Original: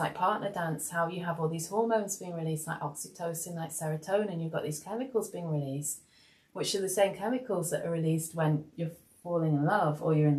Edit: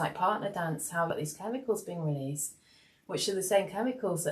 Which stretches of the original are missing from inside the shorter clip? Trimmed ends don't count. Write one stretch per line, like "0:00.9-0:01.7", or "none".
0:01.1-0:04.6